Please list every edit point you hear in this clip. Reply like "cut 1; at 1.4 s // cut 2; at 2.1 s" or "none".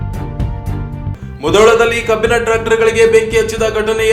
none